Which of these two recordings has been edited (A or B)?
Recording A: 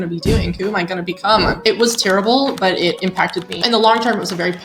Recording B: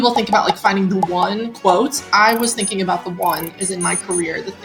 A